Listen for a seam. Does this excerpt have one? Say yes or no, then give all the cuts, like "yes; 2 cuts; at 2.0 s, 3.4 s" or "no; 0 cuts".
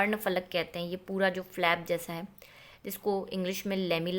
no; 0 cuts